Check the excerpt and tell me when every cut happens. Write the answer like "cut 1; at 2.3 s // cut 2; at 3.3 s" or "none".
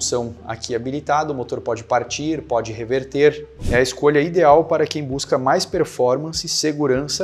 cut 1; at 3.5 s